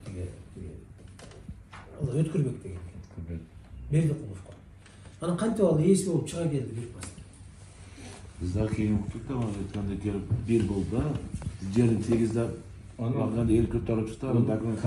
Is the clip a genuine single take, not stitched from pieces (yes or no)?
yes